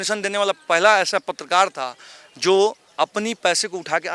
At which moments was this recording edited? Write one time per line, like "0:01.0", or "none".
none